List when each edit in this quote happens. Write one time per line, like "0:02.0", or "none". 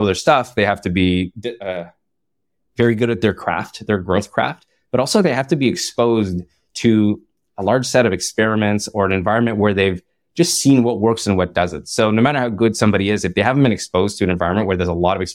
none